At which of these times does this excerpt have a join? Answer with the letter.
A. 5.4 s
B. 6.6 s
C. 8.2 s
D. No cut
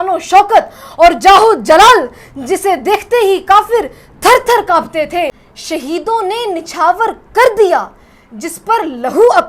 A